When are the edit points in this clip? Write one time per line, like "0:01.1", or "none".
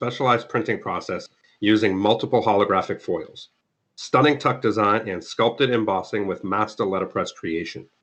none